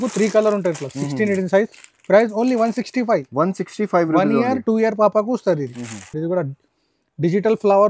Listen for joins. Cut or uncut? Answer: uncut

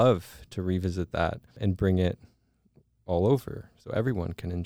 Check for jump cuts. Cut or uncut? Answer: cut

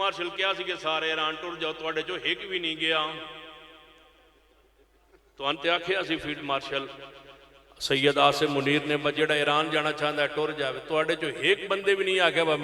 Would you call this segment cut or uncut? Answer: uncut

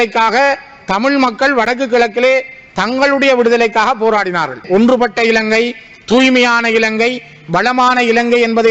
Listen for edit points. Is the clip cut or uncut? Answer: cut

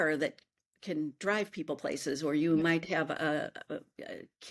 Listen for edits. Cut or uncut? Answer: uncut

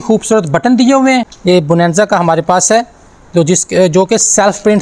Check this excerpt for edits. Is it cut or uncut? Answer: cut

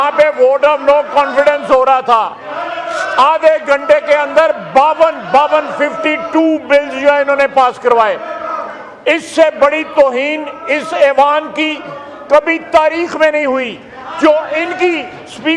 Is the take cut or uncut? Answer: uncut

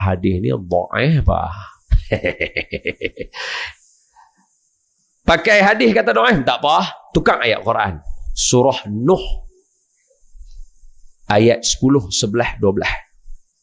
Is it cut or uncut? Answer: uncut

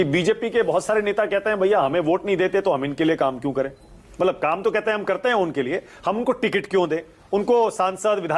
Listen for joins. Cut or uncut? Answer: uncut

